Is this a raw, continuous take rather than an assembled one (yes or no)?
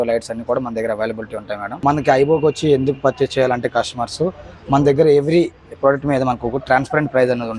no